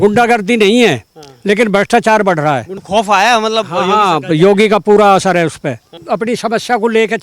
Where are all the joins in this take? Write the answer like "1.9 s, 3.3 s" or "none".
2.8 s